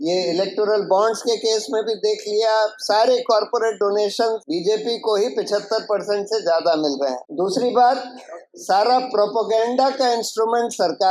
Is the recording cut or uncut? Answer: cut